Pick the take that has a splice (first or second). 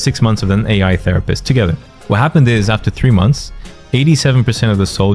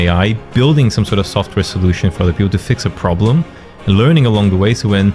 first